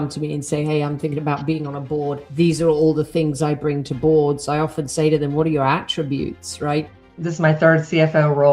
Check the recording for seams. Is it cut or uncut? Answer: cut